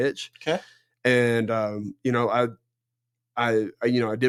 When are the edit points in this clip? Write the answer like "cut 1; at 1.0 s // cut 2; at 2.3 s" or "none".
none